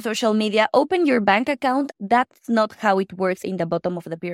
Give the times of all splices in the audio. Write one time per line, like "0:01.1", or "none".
0:01.9
0:03.4